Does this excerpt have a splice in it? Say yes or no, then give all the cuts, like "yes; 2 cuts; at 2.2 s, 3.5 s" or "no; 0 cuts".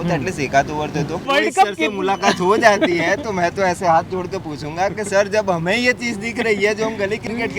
yes; 1 cut; at 1.2 s